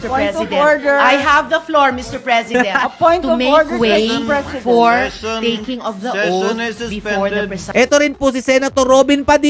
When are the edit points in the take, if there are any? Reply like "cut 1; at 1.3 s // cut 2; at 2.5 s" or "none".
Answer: cut 1; at 7.7 s